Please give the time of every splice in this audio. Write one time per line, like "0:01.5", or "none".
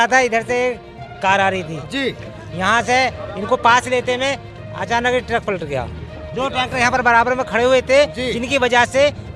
none